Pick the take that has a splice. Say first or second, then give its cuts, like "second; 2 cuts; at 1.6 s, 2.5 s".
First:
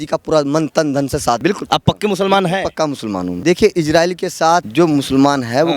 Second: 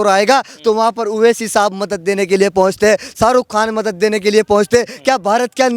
first; 3 cuts; at 1.4 s, 3.3 s, 4.7 s